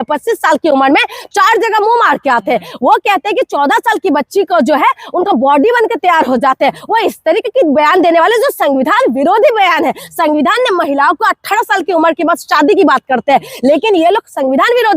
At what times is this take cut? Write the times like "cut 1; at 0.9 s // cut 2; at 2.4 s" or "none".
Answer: none